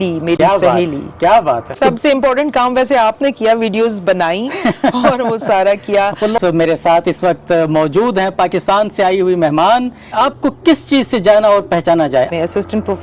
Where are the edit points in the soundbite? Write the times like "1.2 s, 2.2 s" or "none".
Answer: 1.7 s, 6.4 s, 10.1 s, 12.3 s